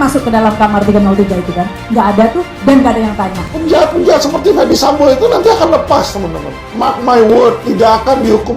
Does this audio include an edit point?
yes; 1 cut; at 3.4 s

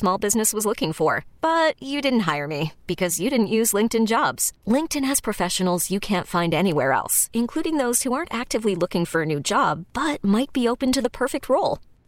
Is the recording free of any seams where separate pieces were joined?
yes; 0 cuts

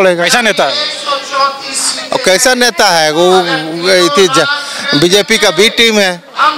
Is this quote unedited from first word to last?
yes; 0 cuts

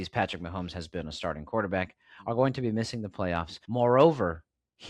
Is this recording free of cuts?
no; 1 cut; at 3.6 s

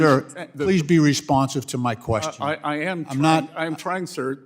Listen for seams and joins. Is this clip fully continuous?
no; 1 cut; at 2.6 s

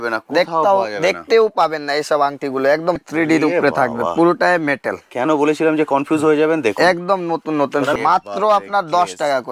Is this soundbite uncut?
no; 2 cuts; at 3.0 s, 7.9 s

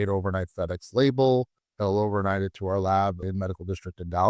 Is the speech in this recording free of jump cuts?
no; 1 cut; at 3.2 s

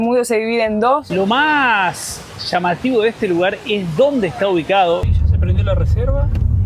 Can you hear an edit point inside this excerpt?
yes; 2 cuts; at 1.1 s, 5.1 s

